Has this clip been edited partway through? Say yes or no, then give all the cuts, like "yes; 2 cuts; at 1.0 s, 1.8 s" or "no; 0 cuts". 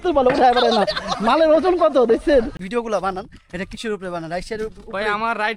yes; 1 cut; at 2.6 s